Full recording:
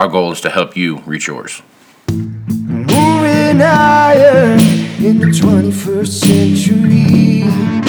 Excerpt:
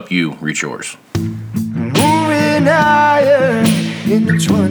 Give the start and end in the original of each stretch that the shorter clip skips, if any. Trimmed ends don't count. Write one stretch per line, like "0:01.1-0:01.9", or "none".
0:01.6-0:01.9

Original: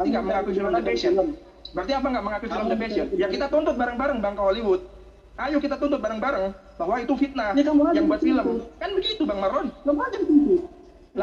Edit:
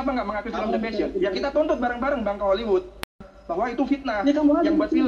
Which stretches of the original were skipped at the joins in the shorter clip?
0:05.3-0:06.6

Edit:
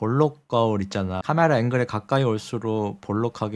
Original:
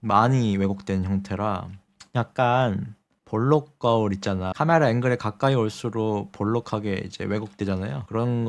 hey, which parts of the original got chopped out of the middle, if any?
none

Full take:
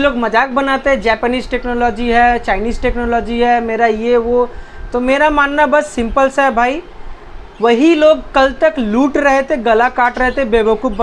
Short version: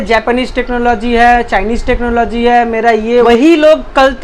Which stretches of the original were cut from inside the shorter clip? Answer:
0:04.2-0:07.6

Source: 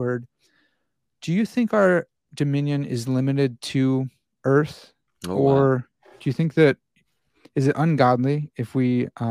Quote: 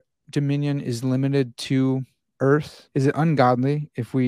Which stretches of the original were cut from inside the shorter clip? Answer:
0:04.8-0:07.4

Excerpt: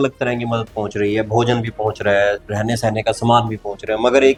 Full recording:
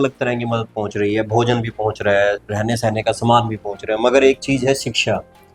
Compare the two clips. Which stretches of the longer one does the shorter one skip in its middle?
none

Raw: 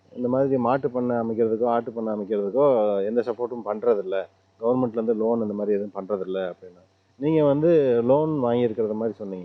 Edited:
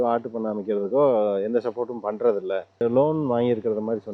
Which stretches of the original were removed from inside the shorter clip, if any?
0:04.4-0:07.9

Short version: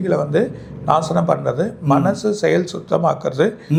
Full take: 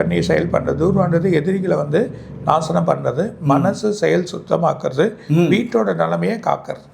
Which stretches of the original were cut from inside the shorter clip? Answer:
none

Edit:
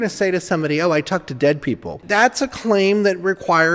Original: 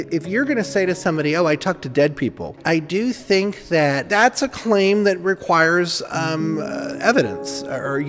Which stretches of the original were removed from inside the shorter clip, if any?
0:02.6-0:04.0

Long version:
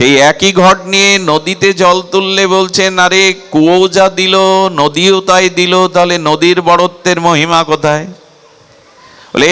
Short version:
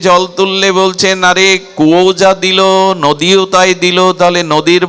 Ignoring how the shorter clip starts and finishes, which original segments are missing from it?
none

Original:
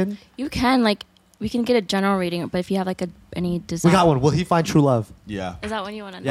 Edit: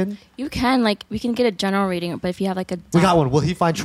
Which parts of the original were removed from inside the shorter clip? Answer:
0:01.1-0:01.4
0:03.1-0:03.7

